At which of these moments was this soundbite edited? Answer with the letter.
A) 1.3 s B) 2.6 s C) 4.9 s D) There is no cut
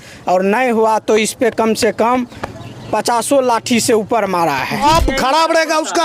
C